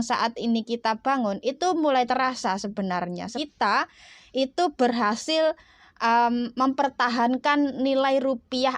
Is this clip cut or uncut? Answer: cut